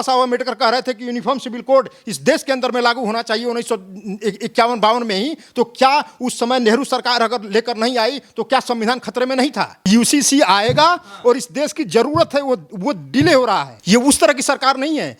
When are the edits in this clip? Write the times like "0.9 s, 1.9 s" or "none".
9.8 s, 13.7 s